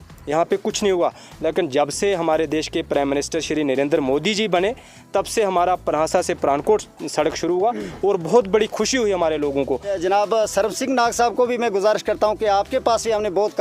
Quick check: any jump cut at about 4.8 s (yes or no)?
no